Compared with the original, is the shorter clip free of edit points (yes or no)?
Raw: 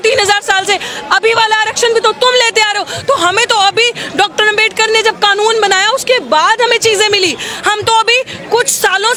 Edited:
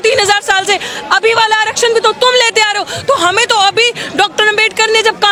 yes